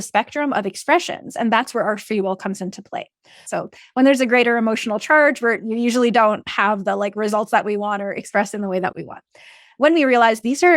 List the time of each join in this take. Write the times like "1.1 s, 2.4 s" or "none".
3.3 s